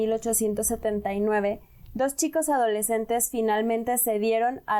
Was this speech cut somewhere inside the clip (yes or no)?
no